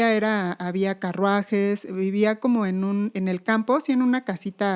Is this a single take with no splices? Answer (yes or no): yes